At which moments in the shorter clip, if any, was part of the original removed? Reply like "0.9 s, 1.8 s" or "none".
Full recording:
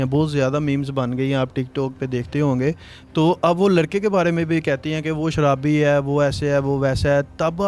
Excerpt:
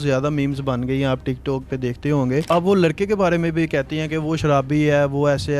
2.5 s